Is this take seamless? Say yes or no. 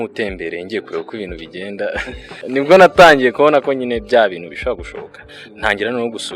no